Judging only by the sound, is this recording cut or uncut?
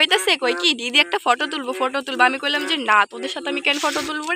uncut